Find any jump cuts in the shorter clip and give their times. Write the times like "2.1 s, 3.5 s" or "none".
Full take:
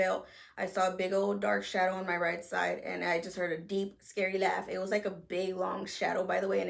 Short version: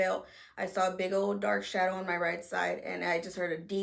none